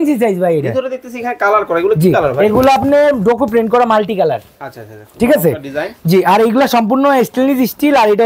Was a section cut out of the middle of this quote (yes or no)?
no